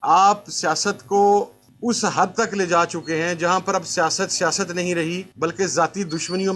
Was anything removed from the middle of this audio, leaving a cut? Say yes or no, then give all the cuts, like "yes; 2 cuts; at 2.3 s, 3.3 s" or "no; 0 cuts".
no; 0 cuts